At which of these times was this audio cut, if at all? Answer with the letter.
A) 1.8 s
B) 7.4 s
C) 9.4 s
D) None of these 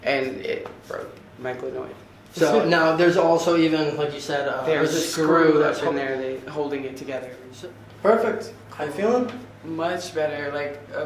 B